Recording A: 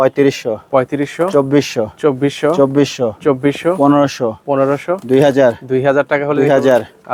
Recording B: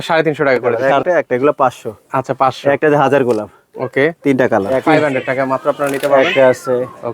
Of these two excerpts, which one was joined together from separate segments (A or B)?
B